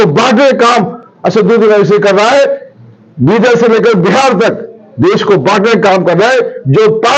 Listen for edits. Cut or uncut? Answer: uncut